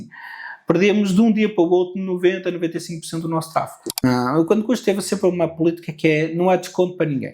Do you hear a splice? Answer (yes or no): yes